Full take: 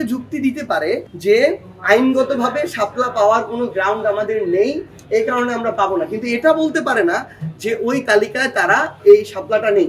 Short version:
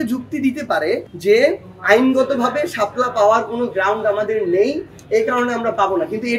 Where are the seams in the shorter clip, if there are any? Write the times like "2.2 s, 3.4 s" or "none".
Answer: none